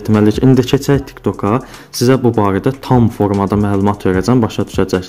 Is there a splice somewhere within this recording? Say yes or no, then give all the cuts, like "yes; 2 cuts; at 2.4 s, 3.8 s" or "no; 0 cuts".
no; 0 cuts